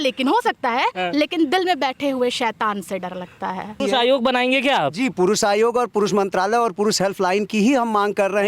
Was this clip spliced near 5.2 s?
no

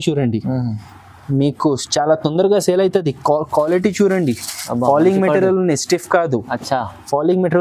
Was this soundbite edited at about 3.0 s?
no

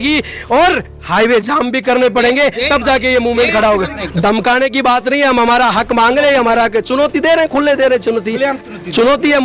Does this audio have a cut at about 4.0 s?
yes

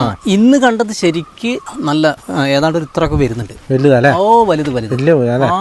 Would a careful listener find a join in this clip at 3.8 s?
no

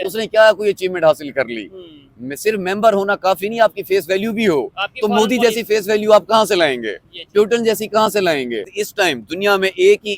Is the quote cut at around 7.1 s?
no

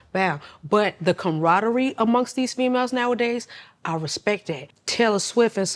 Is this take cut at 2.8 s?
no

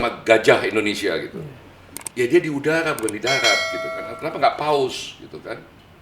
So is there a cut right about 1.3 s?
no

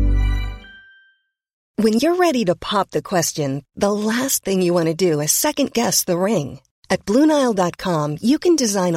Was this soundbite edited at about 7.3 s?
no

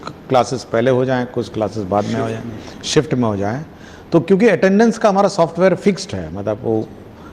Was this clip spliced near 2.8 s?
no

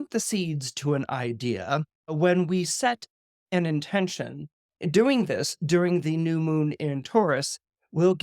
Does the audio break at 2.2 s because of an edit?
yes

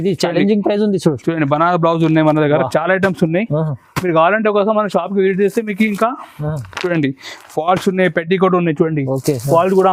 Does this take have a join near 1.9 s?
no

